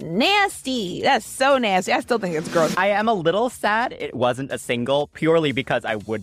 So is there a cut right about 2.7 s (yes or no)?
yes